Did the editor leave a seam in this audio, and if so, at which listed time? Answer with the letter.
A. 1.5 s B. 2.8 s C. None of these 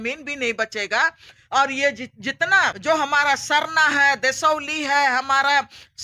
B